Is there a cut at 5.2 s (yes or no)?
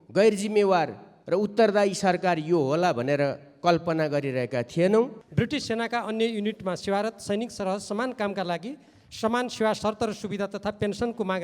yes